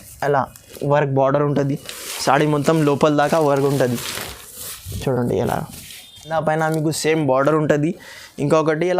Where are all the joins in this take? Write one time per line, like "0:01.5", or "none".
0:06.3